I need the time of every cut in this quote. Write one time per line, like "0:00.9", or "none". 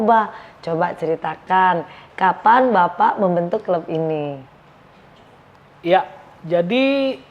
none